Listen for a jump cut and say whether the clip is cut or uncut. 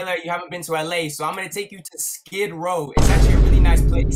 uncut